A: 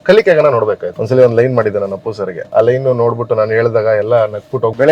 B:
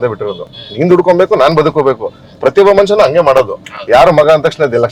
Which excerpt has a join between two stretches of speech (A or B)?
A